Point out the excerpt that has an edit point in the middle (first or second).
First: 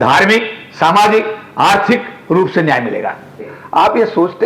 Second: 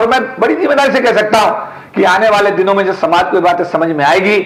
first